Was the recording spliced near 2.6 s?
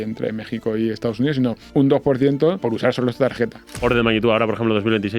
yes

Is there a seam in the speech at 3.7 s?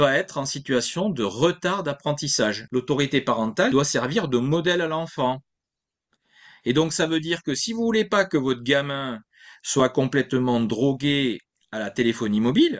yes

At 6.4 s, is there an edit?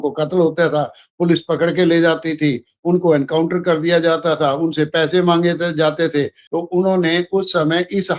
yes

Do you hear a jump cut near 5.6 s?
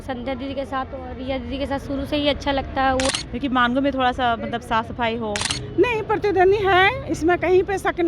yes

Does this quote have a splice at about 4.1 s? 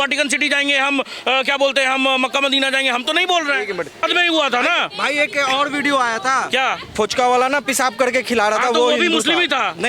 yes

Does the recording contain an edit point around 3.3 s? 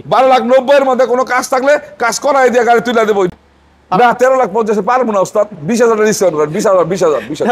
yes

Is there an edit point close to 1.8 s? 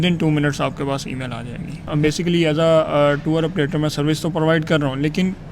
yes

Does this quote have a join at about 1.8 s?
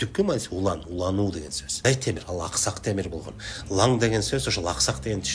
yes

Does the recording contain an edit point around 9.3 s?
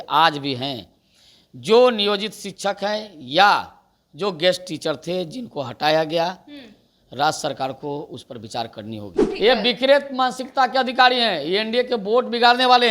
yes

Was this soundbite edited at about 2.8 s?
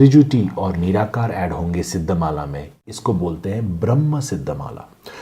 yes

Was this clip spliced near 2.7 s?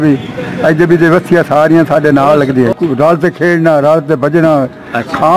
yes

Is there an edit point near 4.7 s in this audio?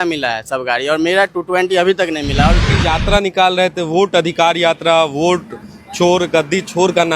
no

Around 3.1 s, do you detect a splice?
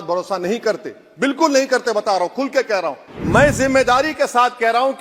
yes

